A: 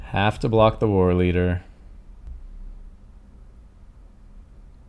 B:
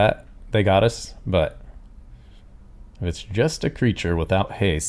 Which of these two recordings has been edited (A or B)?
A